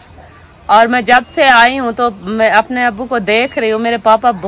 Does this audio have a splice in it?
no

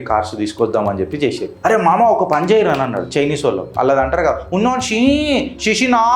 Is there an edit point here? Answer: yes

